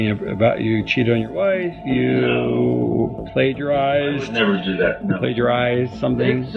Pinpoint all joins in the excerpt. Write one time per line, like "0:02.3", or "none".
0:03.1